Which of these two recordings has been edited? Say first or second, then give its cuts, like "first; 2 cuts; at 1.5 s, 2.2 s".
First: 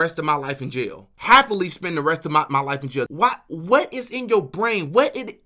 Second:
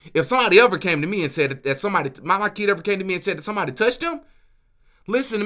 first; 2 cuts; at 1.1 s, 3.1 s